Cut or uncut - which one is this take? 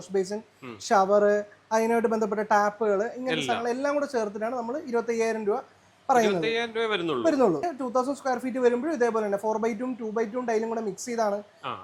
cut